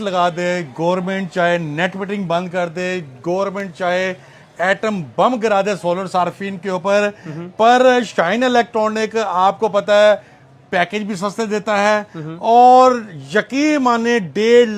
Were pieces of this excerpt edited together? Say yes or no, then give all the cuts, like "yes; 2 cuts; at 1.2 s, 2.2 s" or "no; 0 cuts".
no; 0 cuts